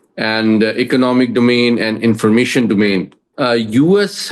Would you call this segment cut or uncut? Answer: cut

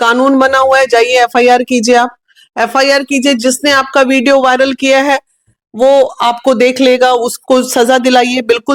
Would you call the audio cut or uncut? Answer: uncut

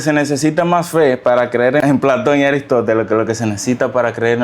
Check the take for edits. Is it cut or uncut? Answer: cut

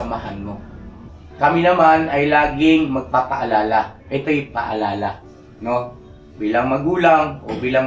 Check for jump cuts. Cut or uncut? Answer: cut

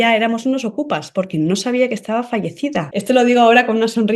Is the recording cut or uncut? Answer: cut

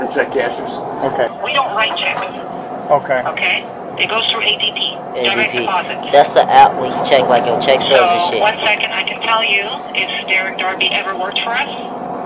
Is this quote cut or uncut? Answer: cut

